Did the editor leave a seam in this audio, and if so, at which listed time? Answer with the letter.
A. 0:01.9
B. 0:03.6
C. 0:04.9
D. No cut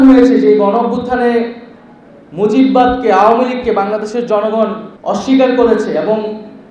C